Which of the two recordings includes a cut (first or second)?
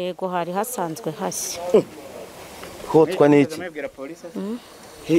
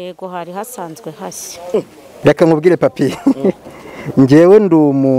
second